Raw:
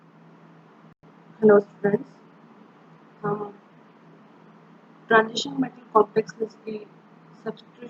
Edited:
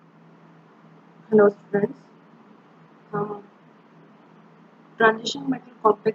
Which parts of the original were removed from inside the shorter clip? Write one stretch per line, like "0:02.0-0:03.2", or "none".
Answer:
0:00.9-0:01.0